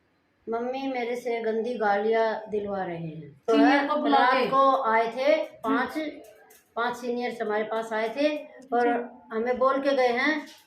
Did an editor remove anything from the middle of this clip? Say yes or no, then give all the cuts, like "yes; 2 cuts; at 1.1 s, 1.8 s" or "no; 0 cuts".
yes; 1 cut; at 3.5 s